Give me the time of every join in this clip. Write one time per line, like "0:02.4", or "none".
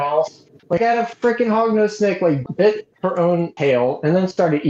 0:02.4
0:03.5